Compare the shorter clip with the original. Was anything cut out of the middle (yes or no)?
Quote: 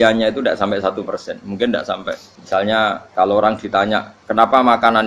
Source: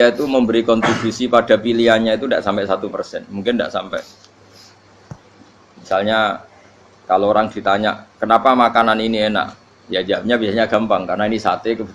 yes